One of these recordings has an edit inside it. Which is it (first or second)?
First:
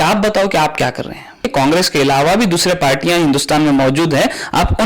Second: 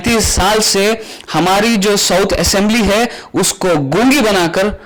first